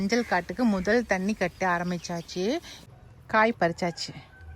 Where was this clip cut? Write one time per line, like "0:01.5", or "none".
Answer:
0:02.8